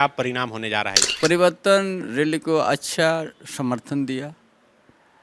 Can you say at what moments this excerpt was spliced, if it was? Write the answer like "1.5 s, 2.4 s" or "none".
1.0 s